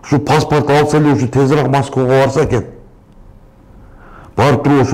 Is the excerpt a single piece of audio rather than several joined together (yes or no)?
yes